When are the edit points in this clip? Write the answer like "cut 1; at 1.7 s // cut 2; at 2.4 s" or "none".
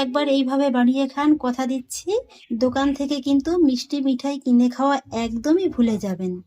cut 1; at 2.4 s